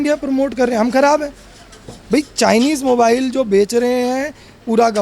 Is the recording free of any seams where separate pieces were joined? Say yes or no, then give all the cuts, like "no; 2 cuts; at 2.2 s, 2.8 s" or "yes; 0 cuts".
yes; 0 cuts